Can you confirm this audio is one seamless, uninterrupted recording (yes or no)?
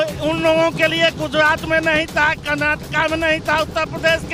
yes